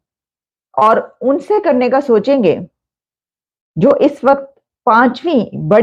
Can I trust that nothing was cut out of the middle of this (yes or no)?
yes